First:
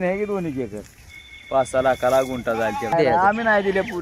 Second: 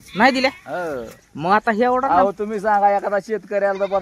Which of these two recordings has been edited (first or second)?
first